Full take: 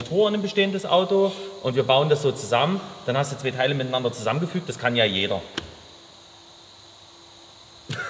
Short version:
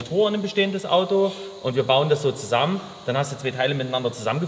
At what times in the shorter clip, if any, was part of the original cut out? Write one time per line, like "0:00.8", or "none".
none